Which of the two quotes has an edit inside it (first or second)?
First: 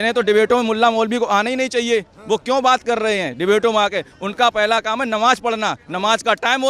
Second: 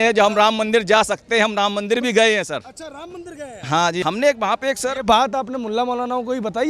second